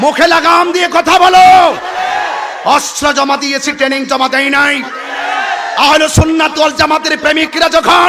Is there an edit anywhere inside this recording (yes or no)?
no